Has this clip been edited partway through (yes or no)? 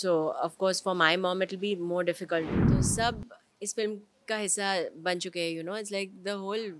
yes